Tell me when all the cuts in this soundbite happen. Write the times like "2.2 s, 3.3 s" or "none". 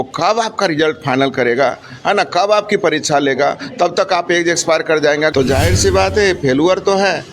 5.3 s